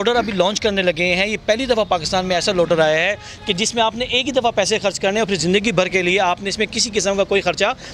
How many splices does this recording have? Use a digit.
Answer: 0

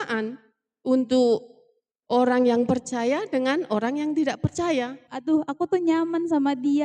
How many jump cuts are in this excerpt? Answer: 1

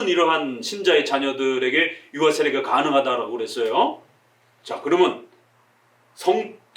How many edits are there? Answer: 0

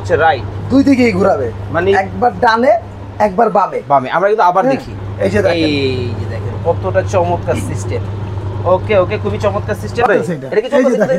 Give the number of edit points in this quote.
1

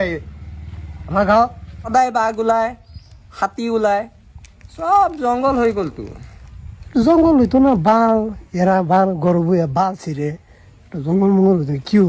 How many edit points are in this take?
1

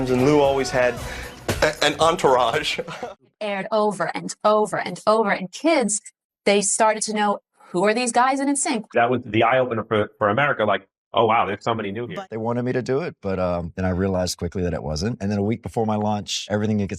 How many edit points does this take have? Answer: 2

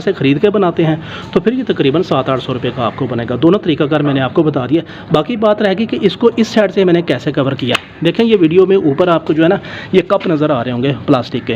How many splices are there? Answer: 0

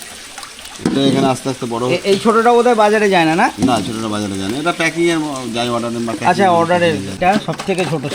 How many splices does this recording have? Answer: 1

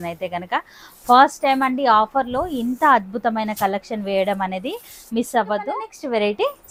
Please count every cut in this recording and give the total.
0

